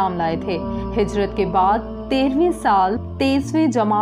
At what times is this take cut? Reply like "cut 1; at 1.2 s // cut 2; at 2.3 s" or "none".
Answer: cut 1; at 3.1 s